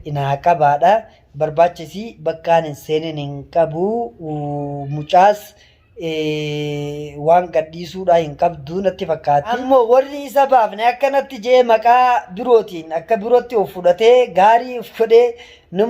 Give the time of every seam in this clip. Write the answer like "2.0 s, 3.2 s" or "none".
9.6 s